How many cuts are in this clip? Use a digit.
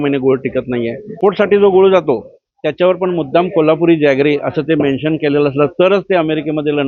1